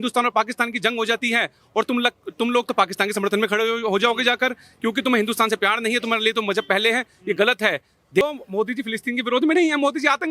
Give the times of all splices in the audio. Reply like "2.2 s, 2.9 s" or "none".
8.2 s